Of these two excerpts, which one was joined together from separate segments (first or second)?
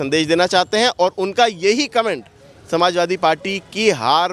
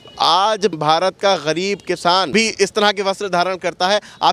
second